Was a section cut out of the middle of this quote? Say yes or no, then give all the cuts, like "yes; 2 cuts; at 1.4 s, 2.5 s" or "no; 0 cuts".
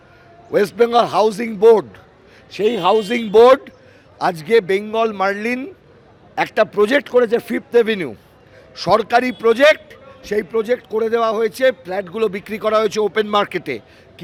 no; 0 cuts